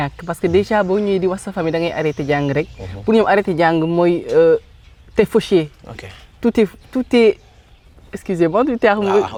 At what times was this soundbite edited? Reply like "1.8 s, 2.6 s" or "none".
none